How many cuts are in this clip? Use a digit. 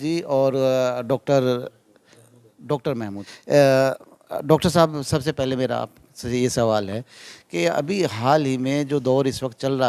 2